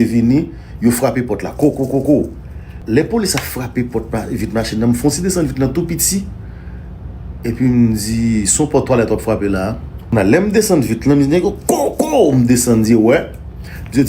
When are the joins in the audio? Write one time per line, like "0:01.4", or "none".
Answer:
0:02.8
0:09.9